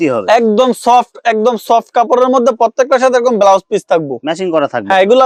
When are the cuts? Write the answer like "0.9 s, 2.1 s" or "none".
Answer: none